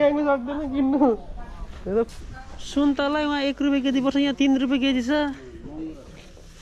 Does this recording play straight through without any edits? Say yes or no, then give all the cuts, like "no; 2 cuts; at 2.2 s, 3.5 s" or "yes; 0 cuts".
no; 1 cut; at 2.1 s